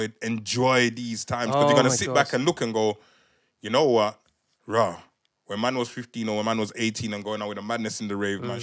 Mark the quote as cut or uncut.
uncut